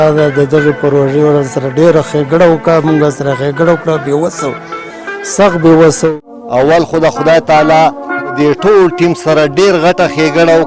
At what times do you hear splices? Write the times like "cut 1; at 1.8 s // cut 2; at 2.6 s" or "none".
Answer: cut 1; at 6.1 s